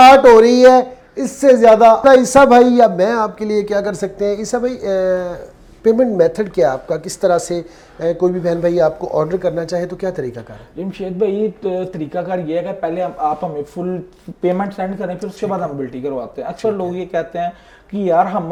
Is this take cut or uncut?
uncut